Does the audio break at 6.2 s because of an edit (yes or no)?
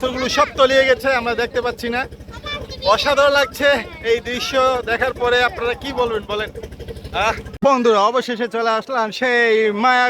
no